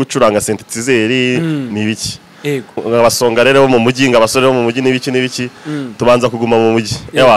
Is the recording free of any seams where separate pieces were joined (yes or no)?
no